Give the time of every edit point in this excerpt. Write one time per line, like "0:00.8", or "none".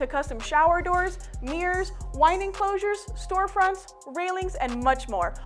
0:01.8